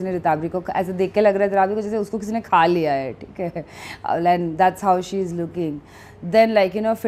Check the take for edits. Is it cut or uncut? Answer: uncut